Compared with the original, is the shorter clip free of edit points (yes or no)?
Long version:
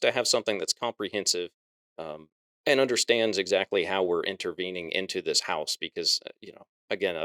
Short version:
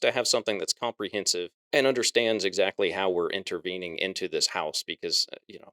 no